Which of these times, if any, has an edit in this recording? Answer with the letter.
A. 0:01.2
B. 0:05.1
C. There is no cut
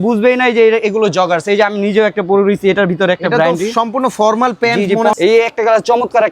B